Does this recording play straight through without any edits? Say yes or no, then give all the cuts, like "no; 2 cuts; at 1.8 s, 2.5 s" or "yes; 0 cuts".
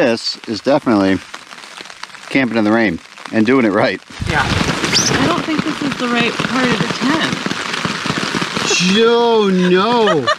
no; 2 cuts; at 4.5 s, 8.5 s